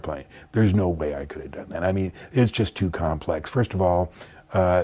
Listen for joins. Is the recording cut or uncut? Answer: uncut